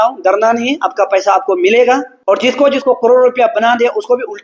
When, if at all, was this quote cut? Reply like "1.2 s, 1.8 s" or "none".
2.1 s